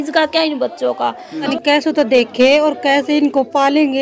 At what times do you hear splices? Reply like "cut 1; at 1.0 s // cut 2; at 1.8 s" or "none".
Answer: cut 1; at 1.5 s